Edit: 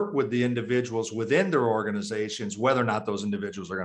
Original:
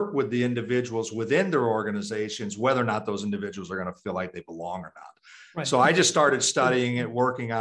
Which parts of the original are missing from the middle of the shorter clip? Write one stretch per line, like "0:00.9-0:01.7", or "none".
none

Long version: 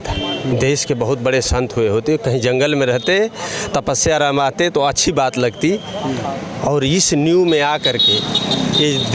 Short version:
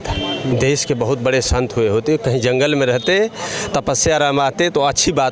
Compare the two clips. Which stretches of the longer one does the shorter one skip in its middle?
none

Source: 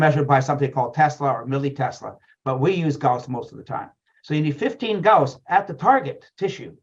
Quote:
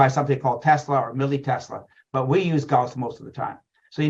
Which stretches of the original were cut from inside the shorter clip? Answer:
none

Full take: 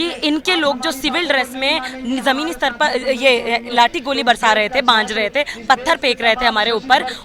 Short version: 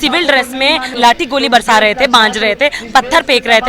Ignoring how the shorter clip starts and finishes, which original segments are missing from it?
0:01.9-0:03.7

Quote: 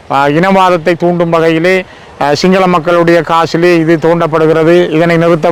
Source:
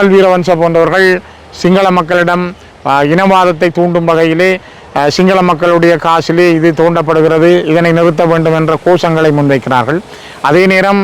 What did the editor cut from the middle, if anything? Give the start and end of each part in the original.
none

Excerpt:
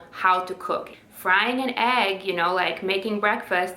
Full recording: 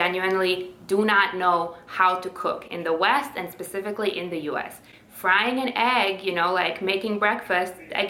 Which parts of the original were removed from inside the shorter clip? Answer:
0:02.7-0:04.9

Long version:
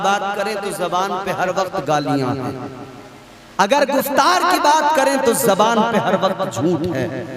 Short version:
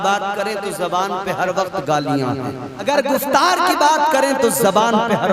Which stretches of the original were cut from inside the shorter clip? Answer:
0:02.8-0:03.7

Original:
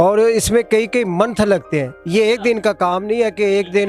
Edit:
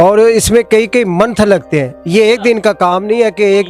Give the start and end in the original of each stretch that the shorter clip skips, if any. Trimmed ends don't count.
none

